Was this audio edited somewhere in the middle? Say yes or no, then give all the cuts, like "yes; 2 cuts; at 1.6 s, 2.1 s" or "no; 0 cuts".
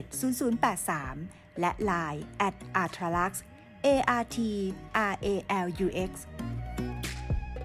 yes; 1 cut; at 6.2 s